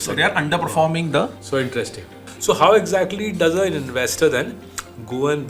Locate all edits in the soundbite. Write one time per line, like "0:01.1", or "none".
0:02.2